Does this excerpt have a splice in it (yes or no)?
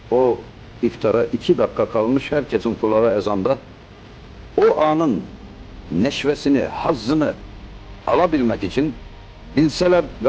no